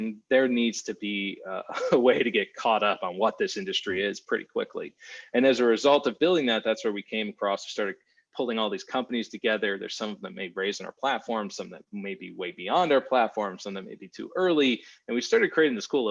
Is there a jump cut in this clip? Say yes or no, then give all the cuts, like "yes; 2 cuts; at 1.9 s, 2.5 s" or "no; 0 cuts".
no; 0 cuts